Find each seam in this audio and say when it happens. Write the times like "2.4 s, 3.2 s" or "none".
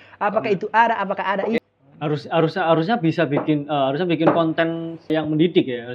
1.6 s

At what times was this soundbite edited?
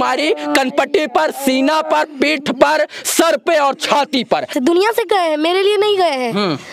4.5 s

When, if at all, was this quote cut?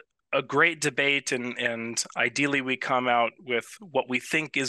none

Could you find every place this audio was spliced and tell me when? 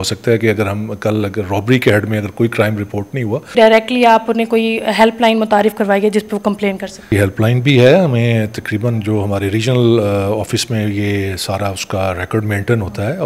3.5 s, 7.1 s

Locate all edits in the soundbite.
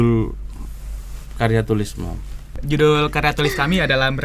2.6 s

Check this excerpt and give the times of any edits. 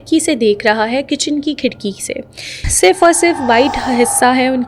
2.6 s

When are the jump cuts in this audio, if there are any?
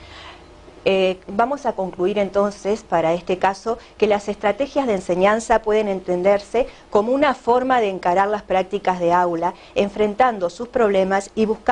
3.8 s

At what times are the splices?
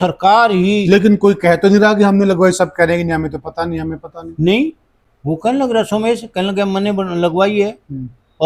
none

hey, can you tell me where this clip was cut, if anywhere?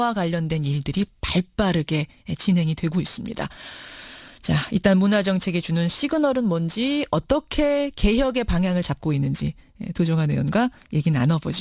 9.5 s

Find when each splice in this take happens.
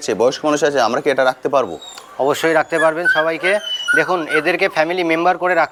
none

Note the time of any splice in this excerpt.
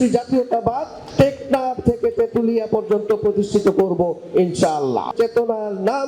5.1 s

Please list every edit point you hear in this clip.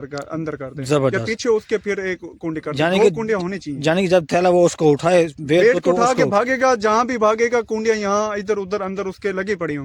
none

